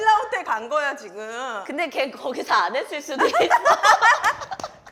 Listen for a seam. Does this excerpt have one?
no; 0 cuts

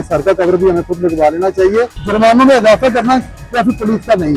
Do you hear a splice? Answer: yes; 1 cut; at 2.0 s

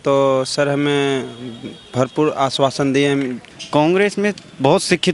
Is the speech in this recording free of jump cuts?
no; 1 cut; at 3.4 s

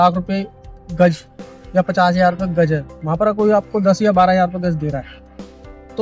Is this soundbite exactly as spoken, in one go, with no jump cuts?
yes; 0 cuts

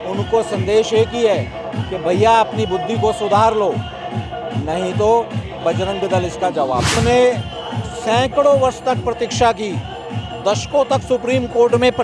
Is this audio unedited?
no; 1 cut; at 6.9 s

